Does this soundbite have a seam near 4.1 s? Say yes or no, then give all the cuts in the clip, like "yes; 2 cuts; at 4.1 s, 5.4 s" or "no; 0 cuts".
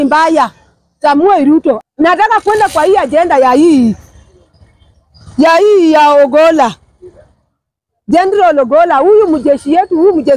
no; 1 cut; at 1.8 s